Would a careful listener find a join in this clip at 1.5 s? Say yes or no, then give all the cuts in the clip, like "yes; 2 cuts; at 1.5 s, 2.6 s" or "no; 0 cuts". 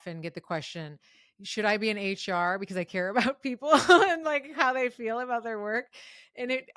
no; 0 cuts